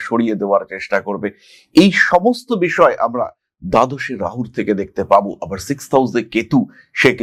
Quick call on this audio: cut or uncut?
uncut